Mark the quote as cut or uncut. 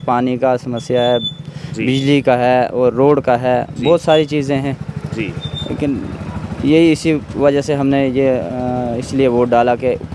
uncut